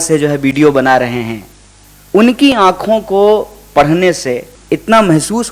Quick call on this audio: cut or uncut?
cut